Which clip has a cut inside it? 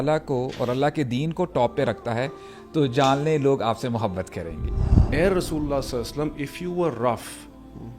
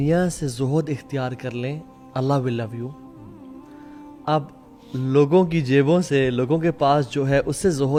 first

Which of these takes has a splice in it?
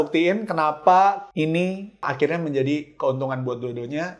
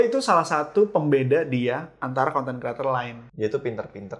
second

